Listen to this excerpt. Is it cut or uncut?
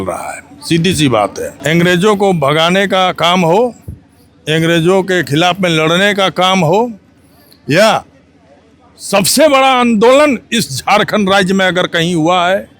cut